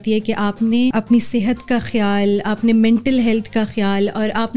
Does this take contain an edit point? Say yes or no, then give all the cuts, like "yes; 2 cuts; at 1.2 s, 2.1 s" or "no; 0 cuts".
yes; 1 cut; at 0.9 s